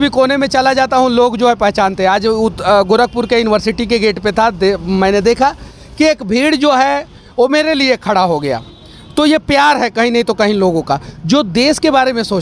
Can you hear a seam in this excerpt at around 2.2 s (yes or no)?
no